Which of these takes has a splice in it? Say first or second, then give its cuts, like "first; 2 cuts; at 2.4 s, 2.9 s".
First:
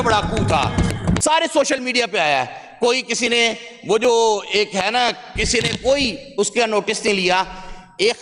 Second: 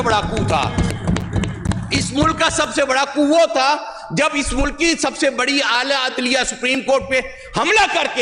first; 1 cut; at 1.2 s